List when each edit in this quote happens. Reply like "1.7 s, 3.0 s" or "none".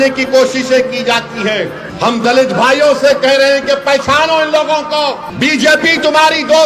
1.8 s, 5.3 s